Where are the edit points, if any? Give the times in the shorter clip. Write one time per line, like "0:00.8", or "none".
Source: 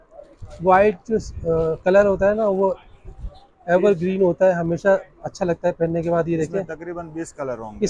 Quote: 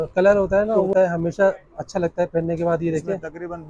0:00.9